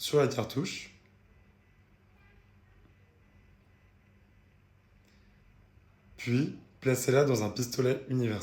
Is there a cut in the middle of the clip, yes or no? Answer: yes